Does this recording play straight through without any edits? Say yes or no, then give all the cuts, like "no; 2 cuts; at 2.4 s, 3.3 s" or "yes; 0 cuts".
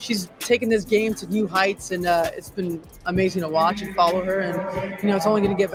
yes; 0 cuts